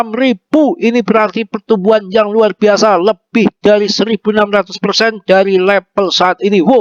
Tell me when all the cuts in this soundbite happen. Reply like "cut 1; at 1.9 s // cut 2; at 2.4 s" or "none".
none